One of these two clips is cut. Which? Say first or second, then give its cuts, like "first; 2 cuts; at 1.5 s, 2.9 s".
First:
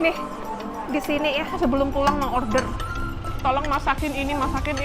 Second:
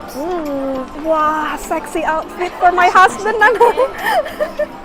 first; 1 cut; at 1.5 s